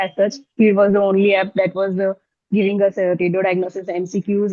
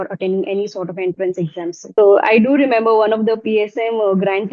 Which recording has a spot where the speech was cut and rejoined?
second; 1 cut; at 1.9 s

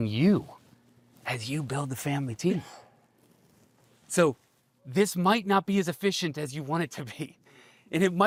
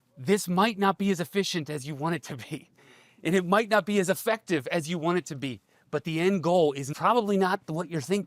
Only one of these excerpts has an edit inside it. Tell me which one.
second; 1 cut; at 6.9 s

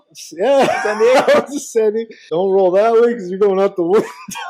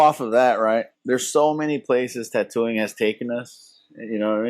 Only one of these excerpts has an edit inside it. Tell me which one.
second; 1 cut; at 0.9 s

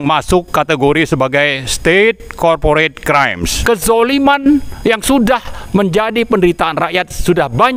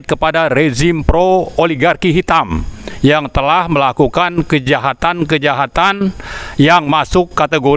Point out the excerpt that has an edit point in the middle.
first; 1 cut; at 3.5 s

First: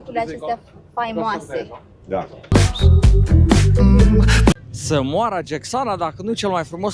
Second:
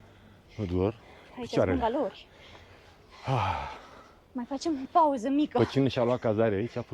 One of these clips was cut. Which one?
first; 2 cuts; at 2.5 s, 4.5 s

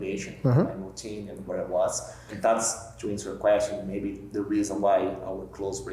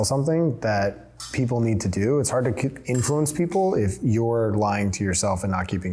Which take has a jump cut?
first; 1 cut; at 2.2 s

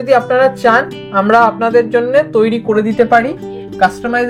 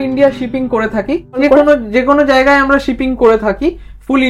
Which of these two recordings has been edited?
second; 1 cut; at 1.3 s

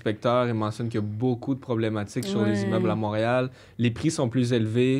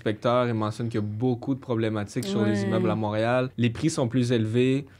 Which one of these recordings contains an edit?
second; 1 cut; at 3.5 s

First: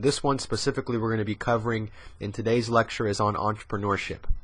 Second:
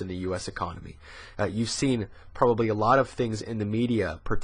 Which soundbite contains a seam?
second; 1 cut; at 2.6 s

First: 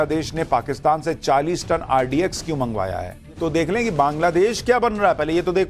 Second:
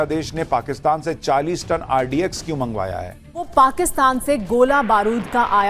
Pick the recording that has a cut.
second; 1 cut; at 3.4 s

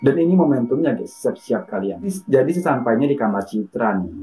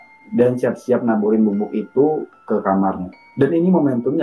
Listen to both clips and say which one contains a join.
first; 1 cut; at 2.2 s

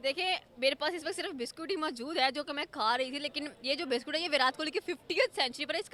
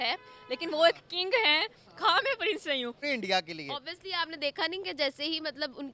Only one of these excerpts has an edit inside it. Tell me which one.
second; 1 cut; at 3.0 s

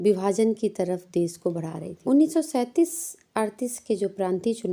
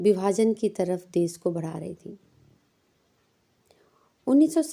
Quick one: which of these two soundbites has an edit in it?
first; 1 cut; at 1.9 s

